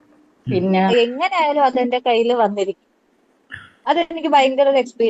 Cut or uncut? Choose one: cut